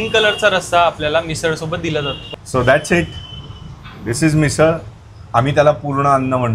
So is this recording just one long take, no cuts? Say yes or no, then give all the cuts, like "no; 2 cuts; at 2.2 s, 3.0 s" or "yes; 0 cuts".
no; 1 cut; at 2.2 s